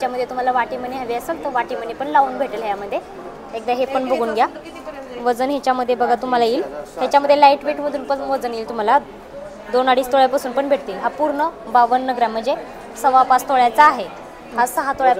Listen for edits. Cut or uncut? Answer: uncut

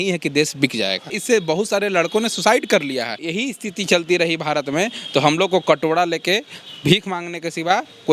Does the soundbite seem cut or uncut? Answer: cut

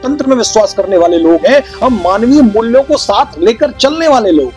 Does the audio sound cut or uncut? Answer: uncut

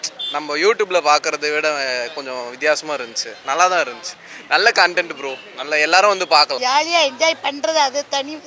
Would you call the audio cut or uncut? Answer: cut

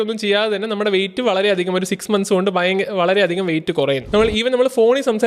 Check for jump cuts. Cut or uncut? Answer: cut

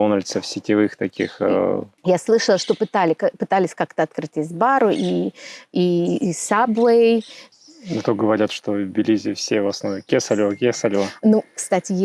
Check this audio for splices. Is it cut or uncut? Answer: cut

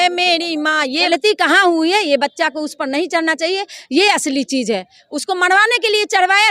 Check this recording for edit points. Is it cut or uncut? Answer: cut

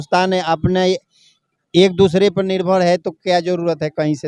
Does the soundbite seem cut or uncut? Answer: uncut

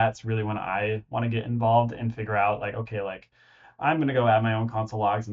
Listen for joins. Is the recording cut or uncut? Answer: uncut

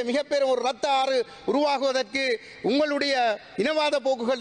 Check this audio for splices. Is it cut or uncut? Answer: uncut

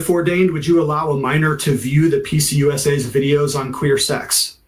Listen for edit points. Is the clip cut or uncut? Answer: uncut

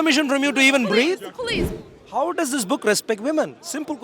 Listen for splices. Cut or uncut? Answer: cut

